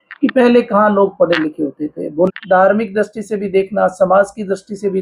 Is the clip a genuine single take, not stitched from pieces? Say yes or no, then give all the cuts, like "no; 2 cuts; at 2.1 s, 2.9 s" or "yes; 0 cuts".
no; 1 cut; at 2.3 s